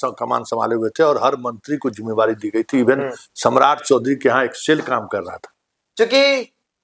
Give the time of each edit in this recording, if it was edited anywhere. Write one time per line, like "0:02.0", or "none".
0:05.5